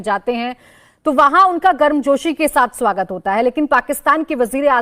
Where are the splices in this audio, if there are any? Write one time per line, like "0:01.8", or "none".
none